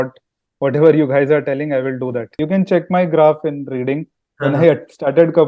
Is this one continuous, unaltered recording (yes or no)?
no